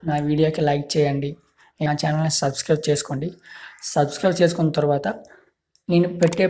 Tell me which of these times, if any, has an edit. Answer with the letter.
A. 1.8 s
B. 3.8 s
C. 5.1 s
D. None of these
A